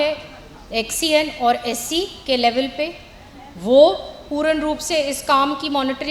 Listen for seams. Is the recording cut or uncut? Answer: uncut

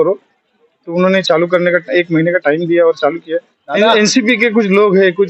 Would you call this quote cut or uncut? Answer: cut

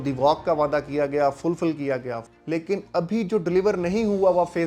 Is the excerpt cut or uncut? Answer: cut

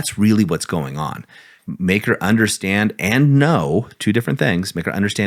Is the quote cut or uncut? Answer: cut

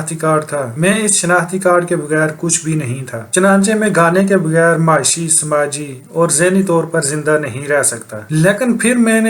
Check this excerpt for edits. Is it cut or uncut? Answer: uncut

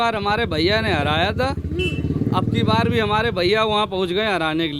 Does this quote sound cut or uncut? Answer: uncut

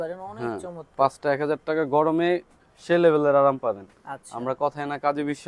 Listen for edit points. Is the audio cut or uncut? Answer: uncut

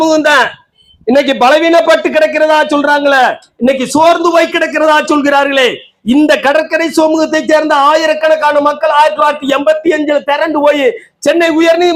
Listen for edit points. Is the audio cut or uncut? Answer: uncut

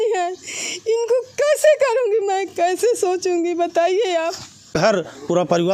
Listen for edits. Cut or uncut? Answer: cut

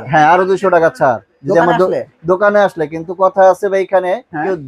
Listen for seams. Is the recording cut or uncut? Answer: uncut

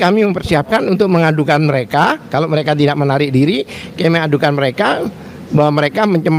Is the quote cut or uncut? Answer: uncut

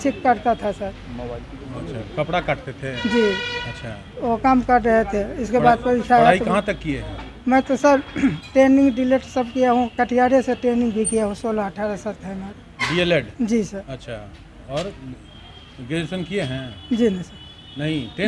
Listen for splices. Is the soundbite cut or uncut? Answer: uncut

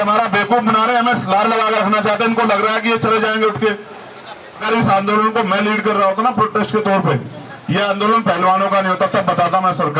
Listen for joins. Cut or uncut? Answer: cut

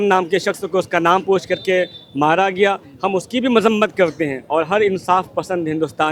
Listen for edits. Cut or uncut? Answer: uncut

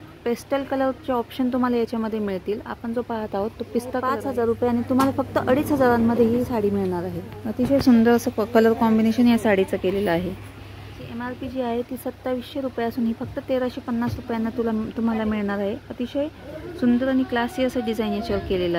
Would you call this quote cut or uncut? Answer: cut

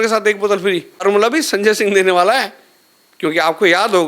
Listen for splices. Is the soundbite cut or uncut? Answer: cut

